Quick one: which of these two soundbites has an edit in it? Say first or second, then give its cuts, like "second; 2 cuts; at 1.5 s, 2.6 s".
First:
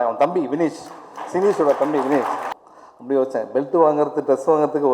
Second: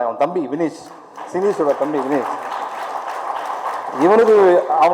first; 1 cut; at 2.5 s